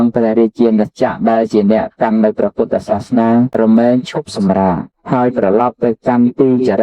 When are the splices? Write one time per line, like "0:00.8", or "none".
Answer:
0:03.8
0:05.3